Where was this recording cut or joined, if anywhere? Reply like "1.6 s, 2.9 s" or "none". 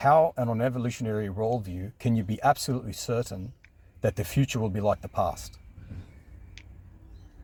none